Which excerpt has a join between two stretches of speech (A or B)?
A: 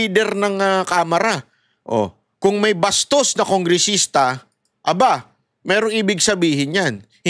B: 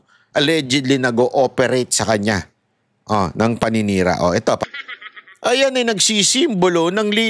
B